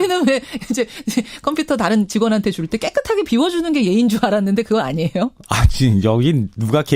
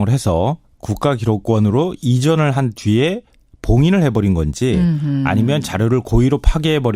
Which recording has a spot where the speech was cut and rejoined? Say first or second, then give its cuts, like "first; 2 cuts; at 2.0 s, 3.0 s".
second; 1 cut; at 1.6 s